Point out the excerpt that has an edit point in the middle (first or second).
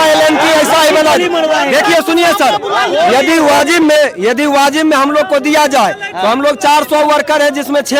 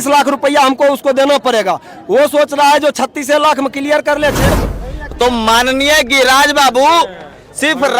second